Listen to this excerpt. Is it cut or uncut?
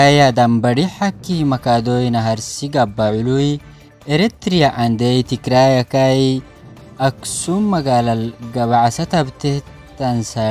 uncut